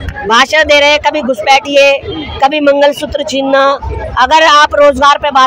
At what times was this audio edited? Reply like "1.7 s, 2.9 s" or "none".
none